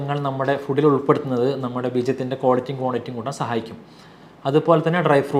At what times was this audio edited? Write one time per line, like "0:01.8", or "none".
none